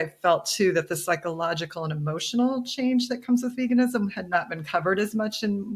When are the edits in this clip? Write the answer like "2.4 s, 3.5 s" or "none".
none